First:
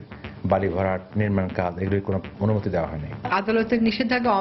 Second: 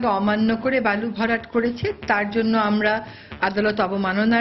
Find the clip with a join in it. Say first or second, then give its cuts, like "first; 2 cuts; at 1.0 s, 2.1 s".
first; 1 cut; at 3.3 s